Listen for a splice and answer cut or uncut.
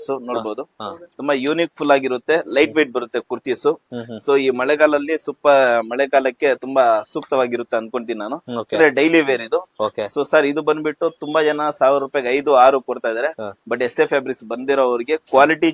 uncut